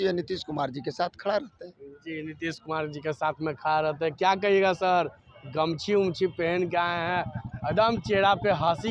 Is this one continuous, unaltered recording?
yes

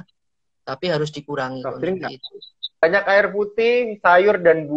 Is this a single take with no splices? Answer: no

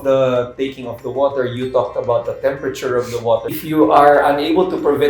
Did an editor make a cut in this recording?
yes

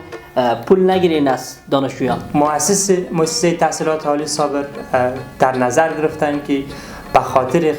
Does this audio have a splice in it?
yes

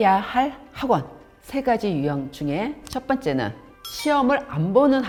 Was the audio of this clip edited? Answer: no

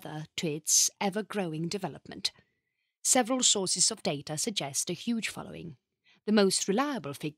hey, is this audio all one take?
no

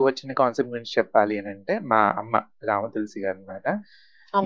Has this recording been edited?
no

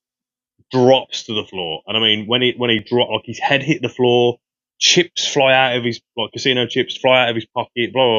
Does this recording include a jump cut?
no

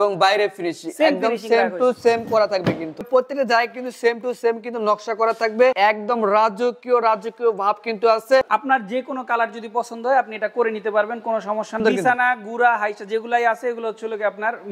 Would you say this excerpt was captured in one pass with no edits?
no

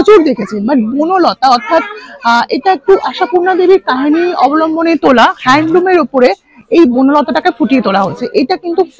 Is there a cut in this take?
no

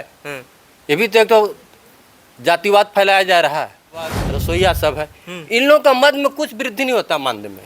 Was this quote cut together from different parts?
yes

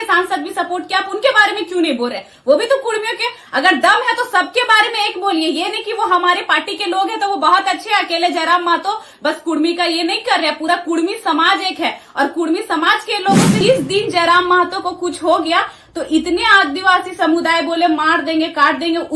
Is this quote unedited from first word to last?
no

